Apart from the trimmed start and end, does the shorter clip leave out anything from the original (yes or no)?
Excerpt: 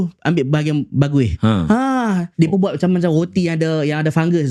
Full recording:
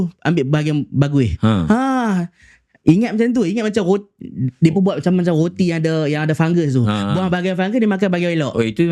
yes